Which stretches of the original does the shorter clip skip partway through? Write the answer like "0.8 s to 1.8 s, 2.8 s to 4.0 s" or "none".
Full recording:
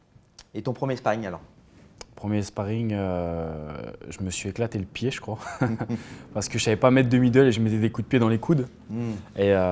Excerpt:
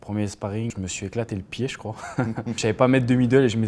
2.8 s to 4.1 s, 6.0 s to 6.6 s